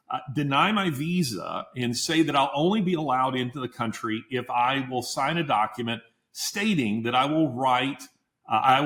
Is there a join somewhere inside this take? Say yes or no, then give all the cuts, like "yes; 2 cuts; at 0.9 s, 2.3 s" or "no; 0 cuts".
no; 0 cuts